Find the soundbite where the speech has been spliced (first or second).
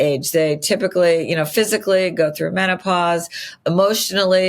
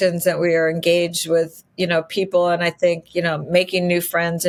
first